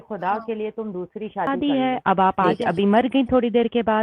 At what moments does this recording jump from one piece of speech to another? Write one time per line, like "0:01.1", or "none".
0:01.5